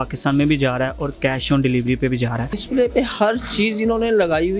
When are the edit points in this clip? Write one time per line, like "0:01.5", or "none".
0:02.6